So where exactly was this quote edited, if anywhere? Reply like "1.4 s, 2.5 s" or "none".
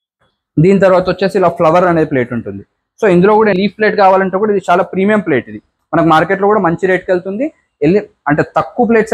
3.6 s

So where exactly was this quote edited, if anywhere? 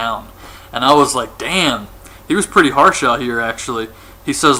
none

